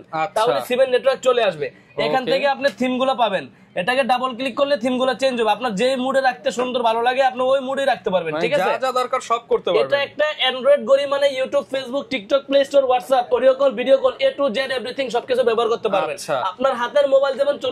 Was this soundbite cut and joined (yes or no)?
no